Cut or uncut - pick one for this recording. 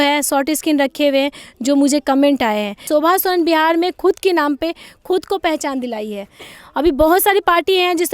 cut